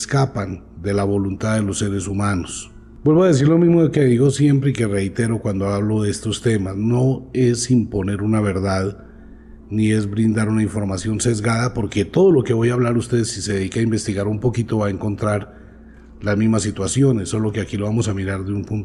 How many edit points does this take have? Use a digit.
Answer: 1